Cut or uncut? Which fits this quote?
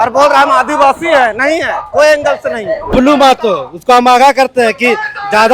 cut